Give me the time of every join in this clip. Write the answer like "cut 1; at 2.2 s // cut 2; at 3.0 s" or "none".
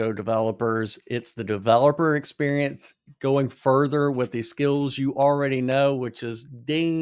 none

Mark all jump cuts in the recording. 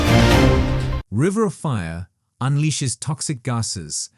cut 1; at 0.9 s

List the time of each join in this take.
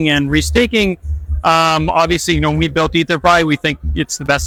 none

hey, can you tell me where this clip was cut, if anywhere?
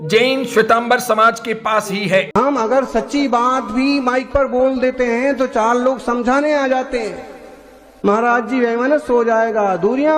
cut 1; at 2.3 s

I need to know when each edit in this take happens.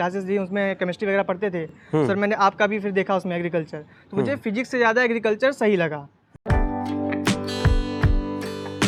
none

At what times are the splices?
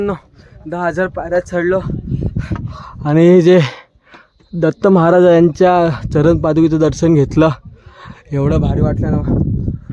none

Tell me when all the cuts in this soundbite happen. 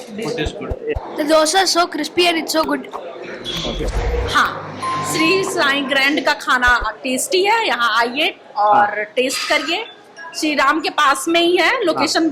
cut 1; at 3.9 s

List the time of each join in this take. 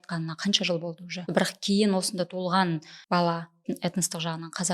cut 1; at 1.2 s // cut 2; at 2.9 s // cut 3; at 3.6 s

